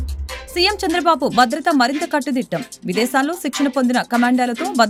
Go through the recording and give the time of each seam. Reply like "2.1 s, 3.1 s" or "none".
none